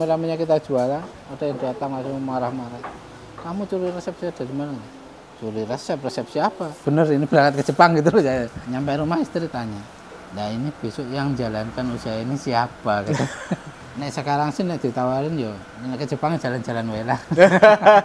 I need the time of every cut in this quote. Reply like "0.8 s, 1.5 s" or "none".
6.7 s, 8.6 s, 13.8 s, 15.7 s